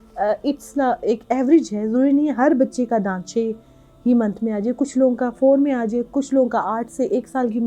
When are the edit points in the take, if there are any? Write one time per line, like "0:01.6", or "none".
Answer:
none

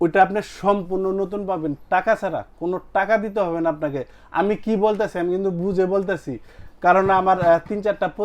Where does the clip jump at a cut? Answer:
none

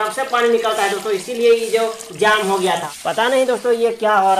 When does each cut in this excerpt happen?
0:02.7

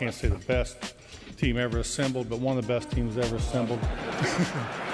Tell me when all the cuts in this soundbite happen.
0:03.9

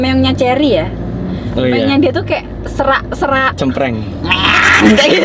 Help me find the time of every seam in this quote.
none

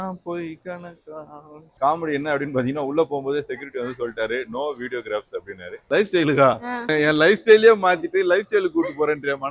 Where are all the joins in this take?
0:01.7
0:05.8

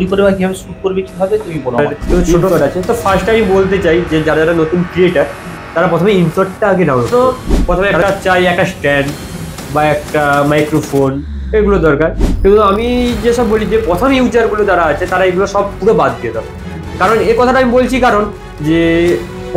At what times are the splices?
0:02.3
0:07.1

